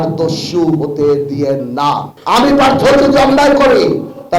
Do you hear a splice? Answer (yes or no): yes